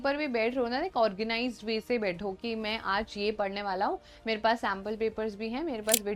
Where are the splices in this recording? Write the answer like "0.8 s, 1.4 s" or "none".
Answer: none